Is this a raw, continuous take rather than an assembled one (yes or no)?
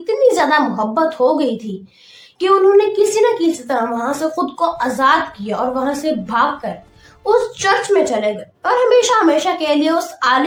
yes